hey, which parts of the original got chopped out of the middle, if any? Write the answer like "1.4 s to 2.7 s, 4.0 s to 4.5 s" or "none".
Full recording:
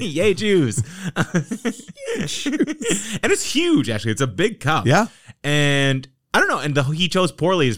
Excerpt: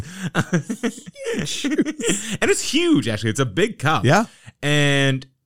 none